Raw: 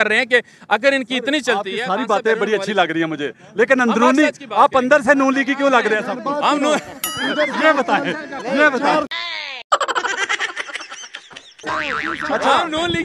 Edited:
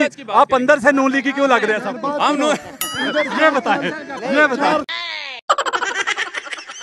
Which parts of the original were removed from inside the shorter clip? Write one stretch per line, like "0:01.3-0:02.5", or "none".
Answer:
none